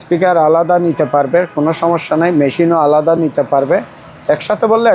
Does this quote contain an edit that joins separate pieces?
no; 0 cuts

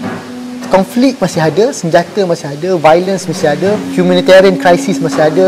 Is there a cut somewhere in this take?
yes; 1 cut; at 3.9 s

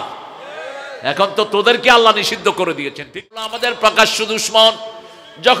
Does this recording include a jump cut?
yes; 1 cut; at 3.4 s

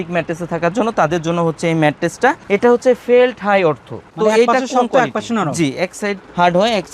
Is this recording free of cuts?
no; 2 cuts; at 2.4 s, 4.0 s

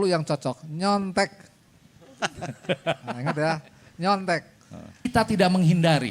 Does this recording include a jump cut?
yes; 1 cut; at 5.1 s

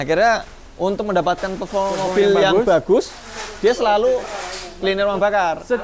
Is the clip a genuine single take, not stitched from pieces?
yes; 0 cuts

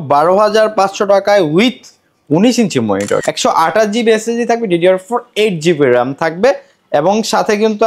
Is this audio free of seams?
no; 1 cut; at 3.2 s

